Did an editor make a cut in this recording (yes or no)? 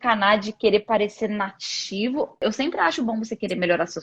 yes